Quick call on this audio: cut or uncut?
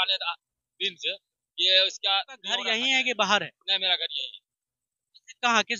cut